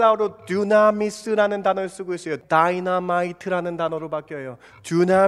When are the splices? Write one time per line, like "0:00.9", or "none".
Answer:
0:02.3

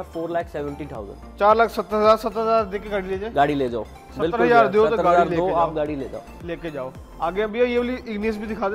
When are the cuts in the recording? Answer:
none

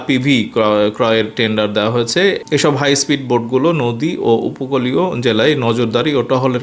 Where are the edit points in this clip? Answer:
none

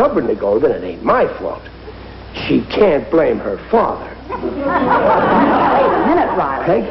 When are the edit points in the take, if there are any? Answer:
none

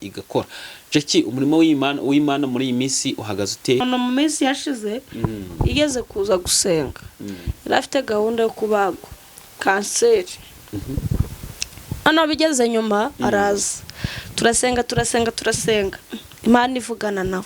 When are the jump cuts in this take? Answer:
0:03.8

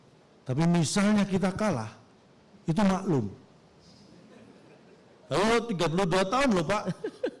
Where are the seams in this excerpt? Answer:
0:05.2

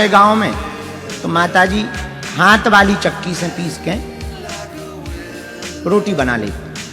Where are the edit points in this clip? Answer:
0:04.0
0:05.8

